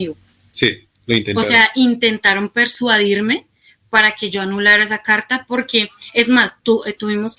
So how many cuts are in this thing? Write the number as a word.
zero